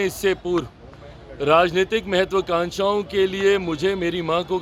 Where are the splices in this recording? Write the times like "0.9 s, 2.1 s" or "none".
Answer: none